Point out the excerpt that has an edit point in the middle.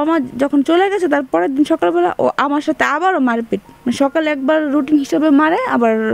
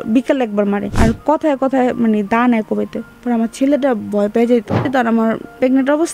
second; 2 cuts; at 0.9 s, 4.9 s

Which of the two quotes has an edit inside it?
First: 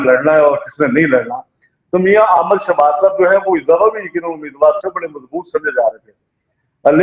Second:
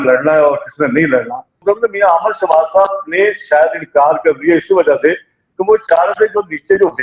second; 1 cut; at 1.5 s

